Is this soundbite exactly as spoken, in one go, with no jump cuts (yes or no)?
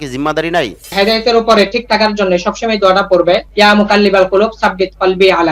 no